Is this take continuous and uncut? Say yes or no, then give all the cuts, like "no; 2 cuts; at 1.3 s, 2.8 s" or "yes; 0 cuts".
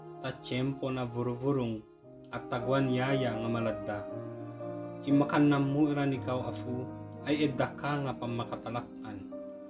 yes; 0 cuts